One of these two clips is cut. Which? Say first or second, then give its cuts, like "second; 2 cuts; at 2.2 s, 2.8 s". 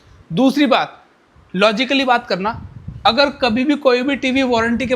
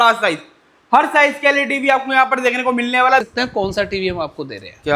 second; 1 cut; at 3.3 s